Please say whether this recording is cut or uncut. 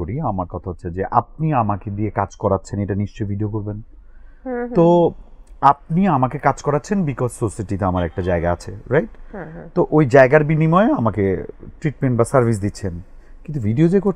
uncut